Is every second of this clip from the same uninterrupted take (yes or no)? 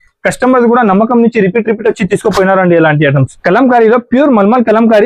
no